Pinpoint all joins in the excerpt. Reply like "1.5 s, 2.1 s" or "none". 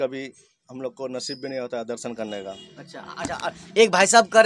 none